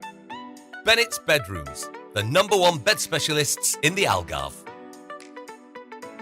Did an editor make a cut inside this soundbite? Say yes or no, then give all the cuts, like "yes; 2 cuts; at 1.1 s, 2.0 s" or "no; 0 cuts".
yes; 2 cuts; at 0.8 s, 4.5 s